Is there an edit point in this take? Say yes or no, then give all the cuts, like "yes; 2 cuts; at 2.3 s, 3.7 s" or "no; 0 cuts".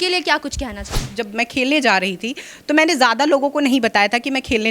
yes; 1 cut; at 1.1 s